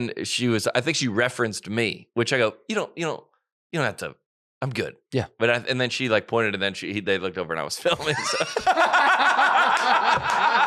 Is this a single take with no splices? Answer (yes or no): yes